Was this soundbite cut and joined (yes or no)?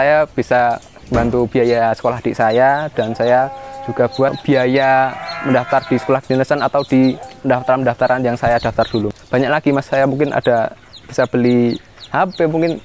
yes